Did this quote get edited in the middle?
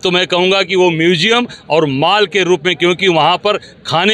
no; 0 cuts

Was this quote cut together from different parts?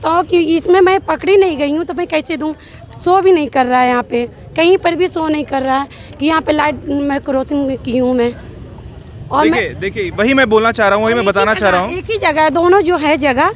no; 0 cuts

